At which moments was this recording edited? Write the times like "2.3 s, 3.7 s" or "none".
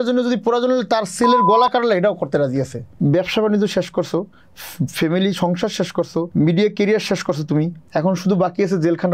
2.8 s, 6.3 s, 7.8 s